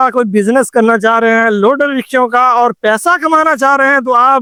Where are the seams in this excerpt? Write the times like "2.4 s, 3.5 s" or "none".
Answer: none